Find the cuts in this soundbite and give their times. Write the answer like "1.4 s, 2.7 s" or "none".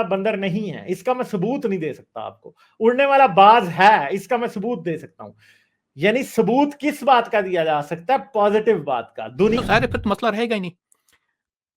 9.6 s